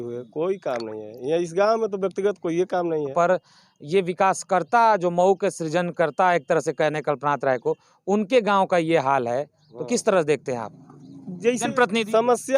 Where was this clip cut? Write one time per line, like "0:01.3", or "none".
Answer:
0:03.1